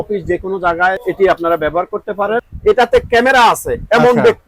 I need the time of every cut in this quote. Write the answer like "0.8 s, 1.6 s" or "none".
1.0 s, 2.5 s